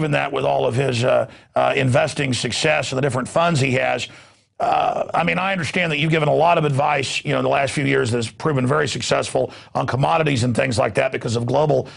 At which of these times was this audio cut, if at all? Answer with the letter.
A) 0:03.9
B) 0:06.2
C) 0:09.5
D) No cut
B